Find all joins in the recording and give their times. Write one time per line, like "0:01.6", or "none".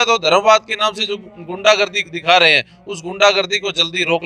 none